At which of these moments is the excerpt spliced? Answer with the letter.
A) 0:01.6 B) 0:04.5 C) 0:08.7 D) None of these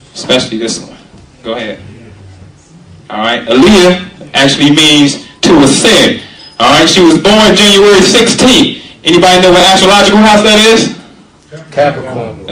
B